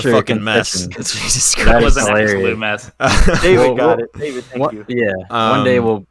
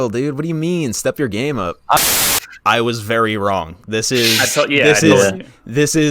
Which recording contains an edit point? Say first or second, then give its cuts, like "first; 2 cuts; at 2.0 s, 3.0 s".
second; 1 cut; at 2.0 s